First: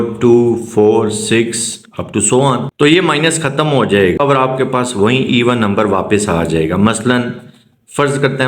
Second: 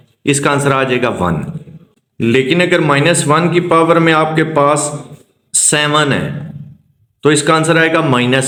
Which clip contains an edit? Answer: first; 2 cuts; at 2.7 s, 4.2 s

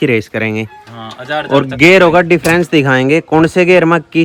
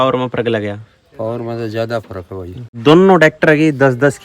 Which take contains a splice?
second; 1 cut; at 2.7 s

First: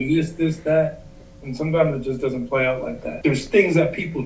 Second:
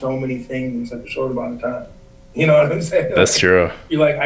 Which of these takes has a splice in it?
first; 1 cut; at 3.0 s

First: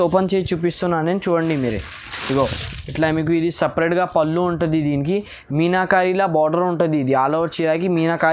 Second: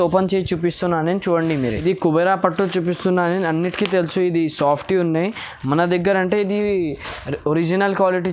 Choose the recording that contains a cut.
second; 1 cut; at 1.8 s

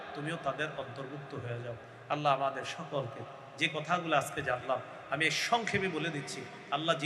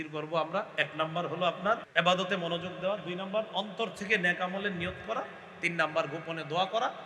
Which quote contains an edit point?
second; 1 cut; at 1.9 s

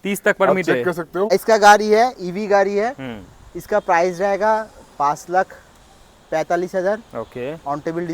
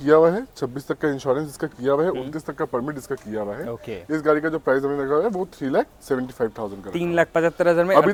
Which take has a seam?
first; 1 cut; at 1.3 s

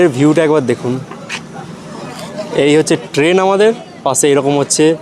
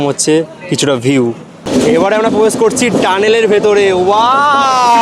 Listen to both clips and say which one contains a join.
second; 1 cut; at 1.5 s

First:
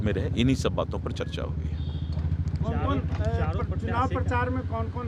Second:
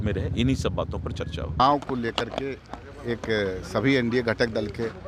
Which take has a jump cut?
second; 1 cut; at 1.4 s

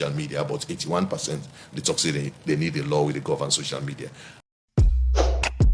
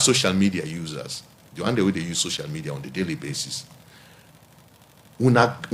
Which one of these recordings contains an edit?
first; 1 cut; at 4.3 s

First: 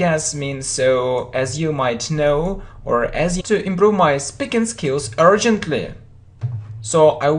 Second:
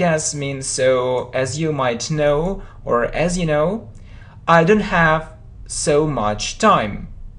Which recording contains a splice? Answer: second; 1 cut; at 3.4 s

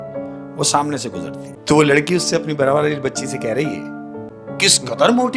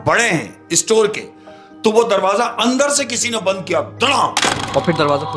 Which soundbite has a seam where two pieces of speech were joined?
first; 2 cuts; at 1.5 s, 4.3 s

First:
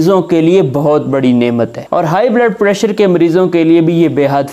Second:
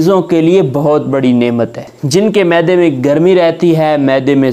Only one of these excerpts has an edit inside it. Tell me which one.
second; 1 cut; at 1.8 s

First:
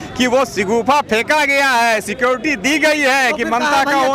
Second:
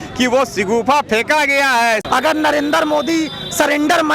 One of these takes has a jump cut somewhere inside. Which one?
second; 1 cut; at 2.1 s

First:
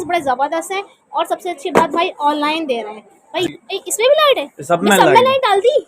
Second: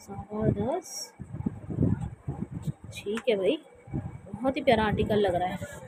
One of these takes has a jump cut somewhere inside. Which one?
first; 1 cut; at 3.5 s

